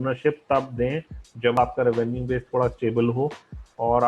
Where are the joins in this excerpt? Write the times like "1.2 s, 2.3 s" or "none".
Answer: 1.6 s